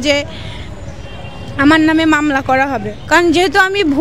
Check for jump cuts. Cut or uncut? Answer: cut